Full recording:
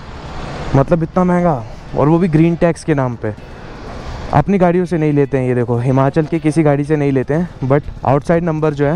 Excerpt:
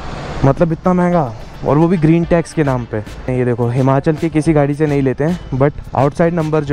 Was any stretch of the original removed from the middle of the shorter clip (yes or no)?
yes